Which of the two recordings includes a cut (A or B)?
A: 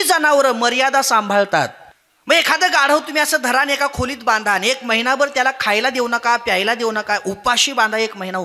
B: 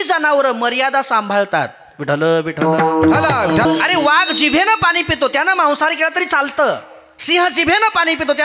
A